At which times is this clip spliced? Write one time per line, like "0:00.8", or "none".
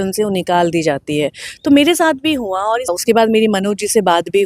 0:02.9